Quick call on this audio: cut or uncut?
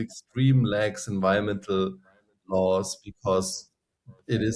uncut